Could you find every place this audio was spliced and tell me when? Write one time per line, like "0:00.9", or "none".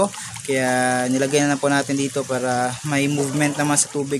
none

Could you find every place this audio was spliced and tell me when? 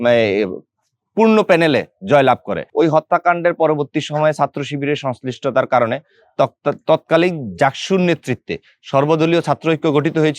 0:02.6

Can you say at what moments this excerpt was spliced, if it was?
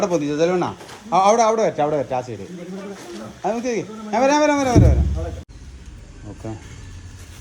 0:05.4

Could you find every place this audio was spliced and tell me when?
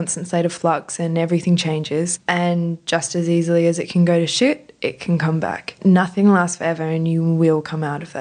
0:02.2
0:05.8

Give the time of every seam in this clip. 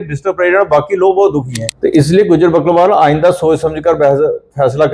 0:01.6

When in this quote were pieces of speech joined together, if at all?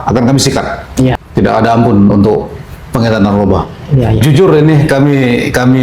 0:01.2
0:04.2

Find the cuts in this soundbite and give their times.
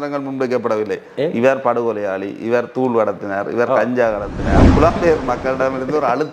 0:04.7

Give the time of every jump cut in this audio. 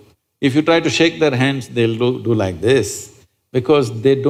none

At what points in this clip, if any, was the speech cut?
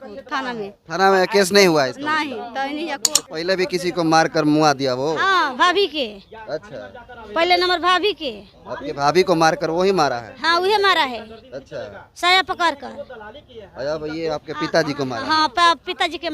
0:03.1

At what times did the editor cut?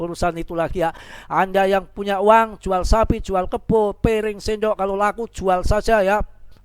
0:01.1

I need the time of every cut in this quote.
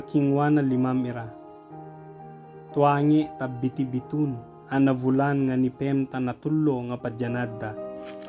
0:01.4
0:02.8
0:07.5

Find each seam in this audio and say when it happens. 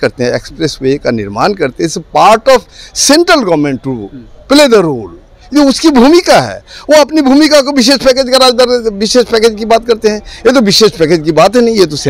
none

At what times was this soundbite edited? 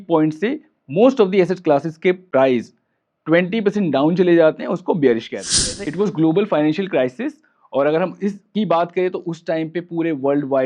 0:05.8

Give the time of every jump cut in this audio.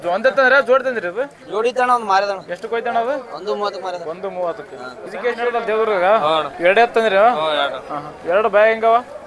0:05.4

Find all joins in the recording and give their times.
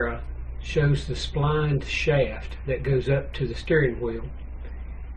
0:02.3

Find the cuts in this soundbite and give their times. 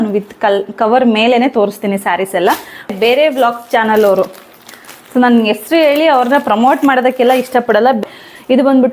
0:02.9
0:08.0

